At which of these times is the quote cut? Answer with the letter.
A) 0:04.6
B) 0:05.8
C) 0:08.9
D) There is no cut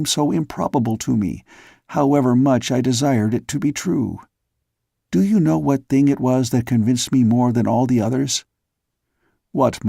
B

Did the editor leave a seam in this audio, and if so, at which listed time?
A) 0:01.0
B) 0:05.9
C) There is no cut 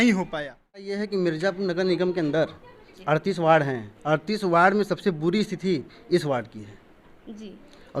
A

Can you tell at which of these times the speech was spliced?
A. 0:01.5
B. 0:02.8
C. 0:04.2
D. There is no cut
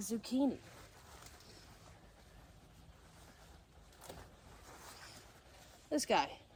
D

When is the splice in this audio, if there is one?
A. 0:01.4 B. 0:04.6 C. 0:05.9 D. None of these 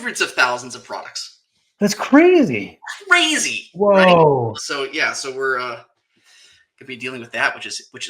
B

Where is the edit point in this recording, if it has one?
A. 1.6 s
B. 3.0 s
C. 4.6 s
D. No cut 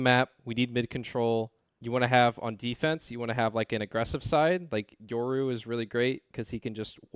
A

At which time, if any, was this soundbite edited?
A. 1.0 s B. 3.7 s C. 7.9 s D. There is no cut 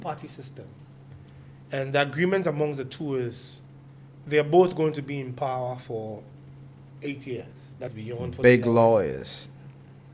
C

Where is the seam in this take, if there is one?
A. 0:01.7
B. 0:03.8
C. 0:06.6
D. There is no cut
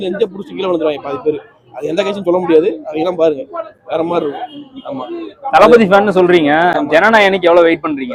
D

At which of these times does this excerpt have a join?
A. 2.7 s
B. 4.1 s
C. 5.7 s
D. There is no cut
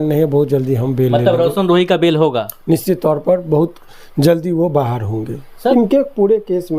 C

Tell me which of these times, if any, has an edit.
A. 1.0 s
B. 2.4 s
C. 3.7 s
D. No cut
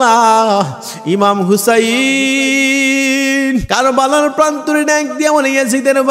C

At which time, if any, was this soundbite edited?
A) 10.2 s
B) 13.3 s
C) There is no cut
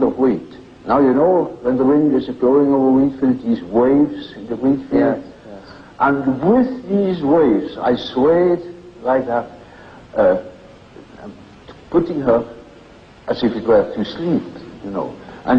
A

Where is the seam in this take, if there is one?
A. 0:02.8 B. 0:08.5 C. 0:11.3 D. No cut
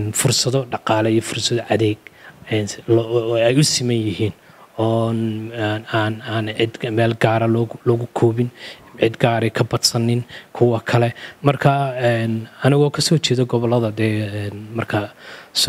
C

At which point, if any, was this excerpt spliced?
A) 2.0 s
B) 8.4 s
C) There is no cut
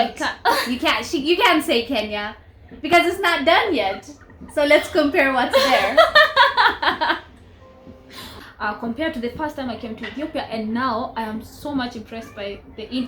B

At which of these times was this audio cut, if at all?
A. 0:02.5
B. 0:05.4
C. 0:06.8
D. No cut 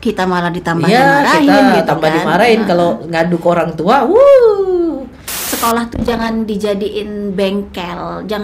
B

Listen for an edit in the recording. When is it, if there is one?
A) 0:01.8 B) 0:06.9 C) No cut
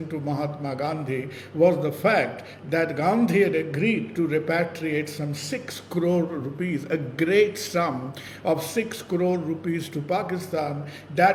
C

